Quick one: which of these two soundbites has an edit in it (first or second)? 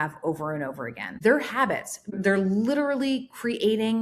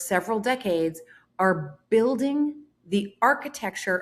first